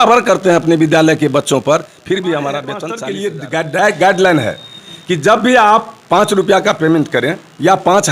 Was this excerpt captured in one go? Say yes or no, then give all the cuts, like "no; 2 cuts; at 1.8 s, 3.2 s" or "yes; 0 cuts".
no; 1 cut; at 2.9 s